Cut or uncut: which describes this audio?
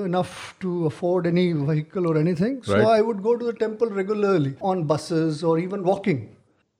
cut